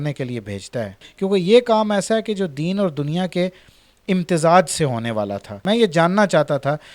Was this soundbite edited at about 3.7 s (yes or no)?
no